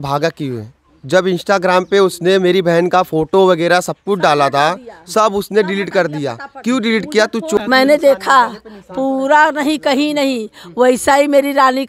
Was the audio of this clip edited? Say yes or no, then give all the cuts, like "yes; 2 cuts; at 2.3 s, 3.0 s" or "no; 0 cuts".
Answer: yes; 1 cut; at 7.6 s